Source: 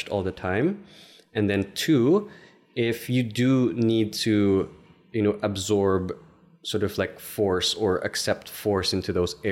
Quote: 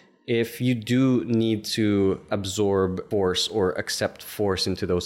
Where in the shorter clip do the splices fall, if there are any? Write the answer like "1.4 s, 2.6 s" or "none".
2.6 s